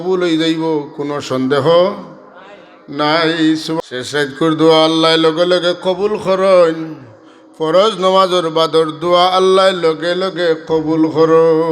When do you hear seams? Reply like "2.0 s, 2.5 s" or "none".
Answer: 3.8 s